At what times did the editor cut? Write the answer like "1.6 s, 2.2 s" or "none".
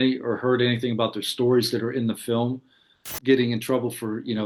3.1 s